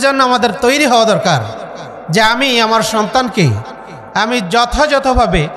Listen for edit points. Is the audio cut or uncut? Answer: uncut